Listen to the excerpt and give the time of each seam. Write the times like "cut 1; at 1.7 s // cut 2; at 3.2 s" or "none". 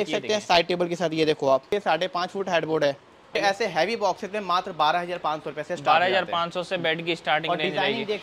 cut 1; at 1.7 s // cut 2; at 3.4 s